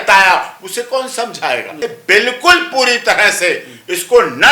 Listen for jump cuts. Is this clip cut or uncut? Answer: cut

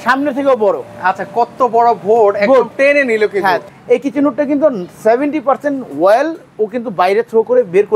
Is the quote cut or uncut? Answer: cut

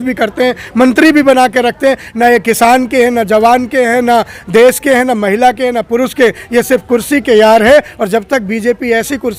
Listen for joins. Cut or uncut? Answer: uncut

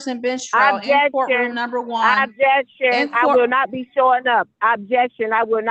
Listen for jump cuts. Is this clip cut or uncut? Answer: uncut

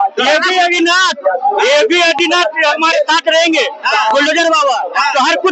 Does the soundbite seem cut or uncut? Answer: uncut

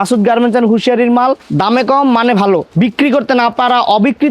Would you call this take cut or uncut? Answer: cut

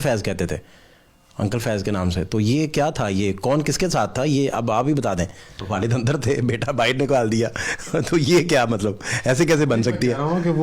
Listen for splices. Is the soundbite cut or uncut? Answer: cut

